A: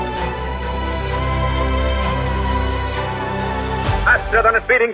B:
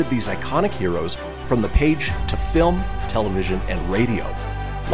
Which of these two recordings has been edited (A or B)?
A